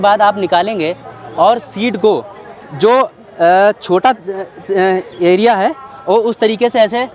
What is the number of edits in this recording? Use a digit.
0